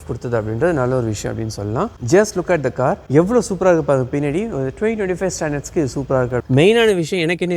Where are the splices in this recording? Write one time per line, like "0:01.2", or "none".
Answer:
0:02.0
0:06.4

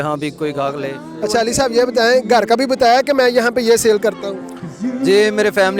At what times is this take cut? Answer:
0:01.0

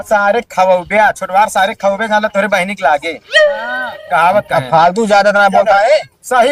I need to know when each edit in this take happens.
none

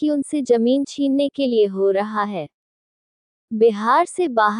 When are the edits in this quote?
0:03.3

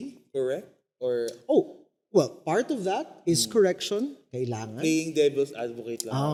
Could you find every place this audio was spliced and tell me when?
none

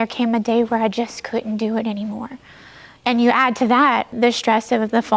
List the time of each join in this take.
0:04.1

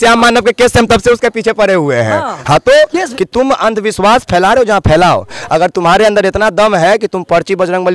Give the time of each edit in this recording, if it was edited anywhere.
0:03.1

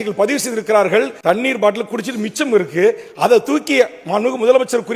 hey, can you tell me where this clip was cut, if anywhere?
0:01.1

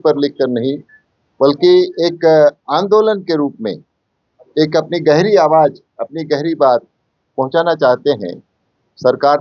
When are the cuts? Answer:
none

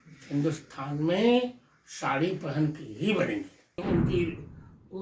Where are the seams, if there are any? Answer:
0:03.8

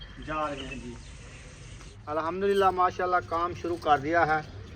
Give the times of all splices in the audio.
0:01.9

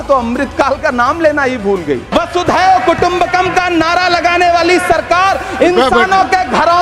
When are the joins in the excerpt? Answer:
0:02.0

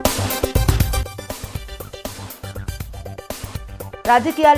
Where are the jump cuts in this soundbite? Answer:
0:01.1
0:02.7

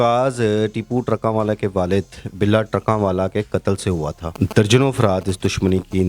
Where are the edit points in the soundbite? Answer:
0:04.2

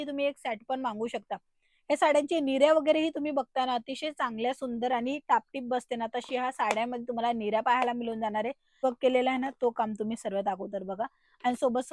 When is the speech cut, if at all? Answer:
0:08.8

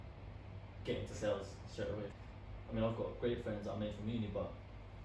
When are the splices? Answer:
0:02.1

